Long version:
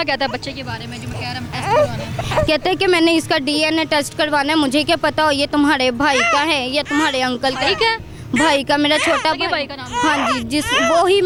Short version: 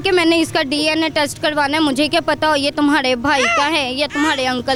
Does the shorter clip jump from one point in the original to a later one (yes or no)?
no